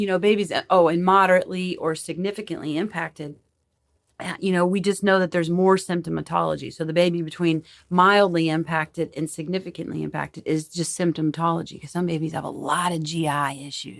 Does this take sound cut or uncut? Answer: uncut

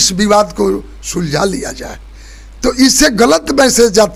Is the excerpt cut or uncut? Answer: uncut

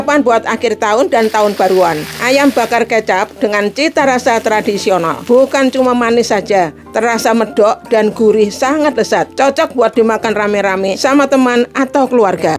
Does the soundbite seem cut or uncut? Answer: cut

